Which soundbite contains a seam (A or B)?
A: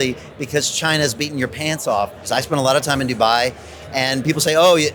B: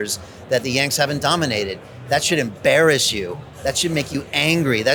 A